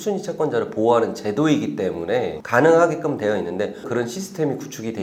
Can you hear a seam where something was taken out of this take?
yes; 1 cut; at 3.8 s

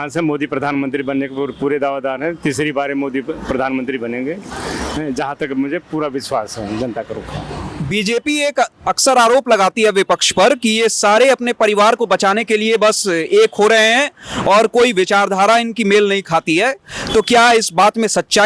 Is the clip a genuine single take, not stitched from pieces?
yes; 0 cuts

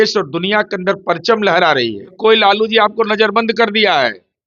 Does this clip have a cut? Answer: yes; 1 cut; at 2.1 s

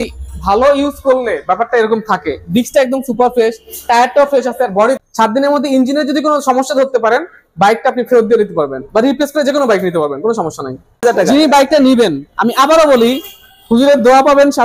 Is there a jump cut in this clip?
yes; 2 cuts; at 5.0 s, 11.0 s

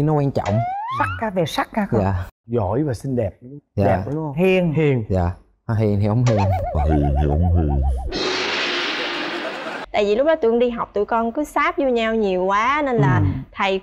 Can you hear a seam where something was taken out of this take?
yes; 1 cut; at 9.8 s

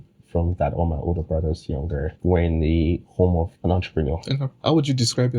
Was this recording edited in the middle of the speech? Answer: yes; 3 cuts; at 2.1 s, 3.5 s, 4.5 s

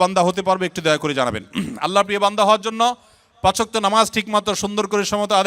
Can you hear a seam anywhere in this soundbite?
no; 0 cuts

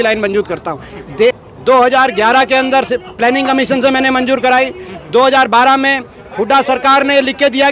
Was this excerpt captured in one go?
no; 1 cut; at 1.4 s

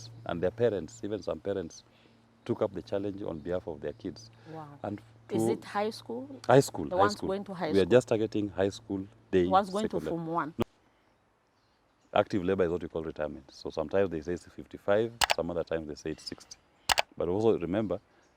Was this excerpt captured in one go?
no; 1 cut; at 10.6 s

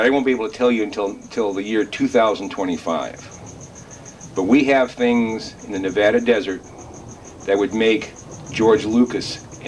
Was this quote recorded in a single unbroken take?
yes; 0 cuts

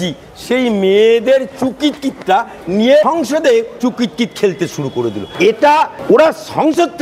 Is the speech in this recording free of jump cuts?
no; 3 cuts; at 3.4 s, 5.2 s, 6.0 s

